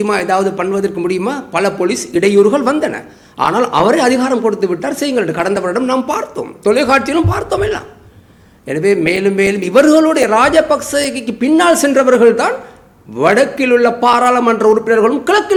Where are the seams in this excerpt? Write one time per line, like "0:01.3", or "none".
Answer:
none